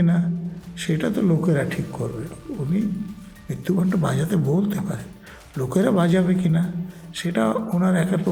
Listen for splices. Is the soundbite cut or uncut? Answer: uncut